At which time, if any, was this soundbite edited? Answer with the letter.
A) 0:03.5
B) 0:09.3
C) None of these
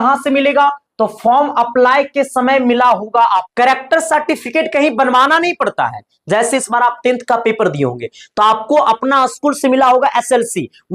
A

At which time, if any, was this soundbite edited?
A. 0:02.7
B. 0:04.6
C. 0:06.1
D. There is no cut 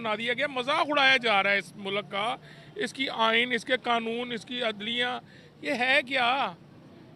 D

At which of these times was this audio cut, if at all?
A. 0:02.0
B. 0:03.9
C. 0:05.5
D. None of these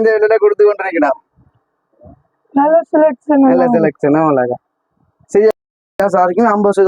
C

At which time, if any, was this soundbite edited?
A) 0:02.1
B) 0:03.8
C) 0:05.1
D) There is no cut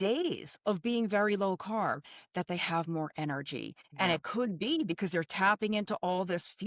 B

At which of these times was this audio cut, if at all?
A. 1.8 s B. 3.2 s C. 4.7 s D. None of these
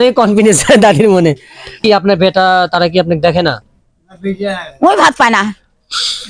A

